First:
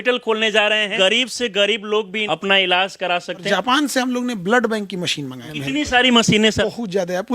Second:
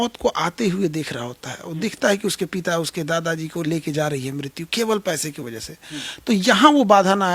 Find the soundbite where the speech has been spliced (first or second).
first